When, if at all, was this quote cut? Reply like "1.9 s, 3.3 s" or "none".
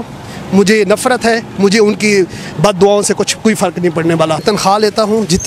4.4 s